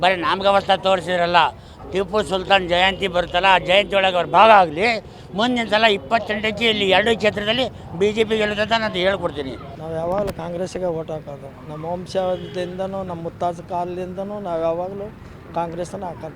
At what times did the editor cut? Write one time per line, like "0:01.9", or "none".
0:09.6